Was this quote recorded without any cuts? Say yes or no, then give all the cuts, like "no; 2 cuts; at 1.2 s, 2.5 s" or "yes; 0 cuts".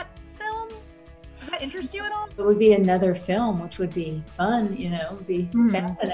no; 1 cut; at 2.4 s